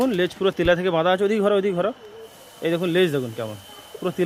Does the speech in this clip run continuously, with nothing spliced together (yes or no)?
yes